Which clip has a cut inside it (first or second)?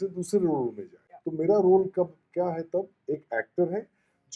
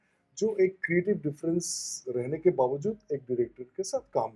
first